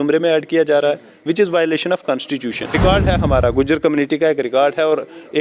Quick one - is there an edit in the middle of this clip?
yes; 1 cut; at 2.8 s

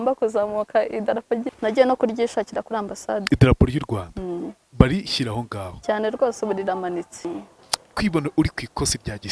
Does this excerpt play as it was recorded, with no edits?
no; 2 cuts; at 1.5 s, 7.3 s

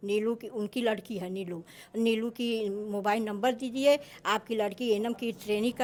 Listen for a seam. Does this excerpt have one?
no; 0 cuts

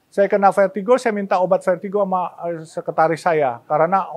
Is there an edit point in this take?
no; 0 cuts

